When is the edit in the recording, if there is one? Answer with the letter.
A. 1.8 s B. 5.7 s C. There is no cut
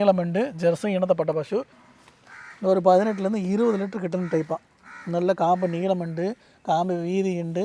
A